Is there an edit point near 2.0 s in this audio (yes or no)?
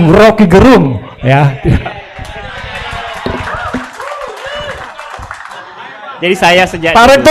no